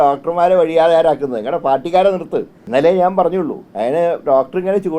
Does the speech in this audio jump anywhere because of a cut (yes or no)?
yes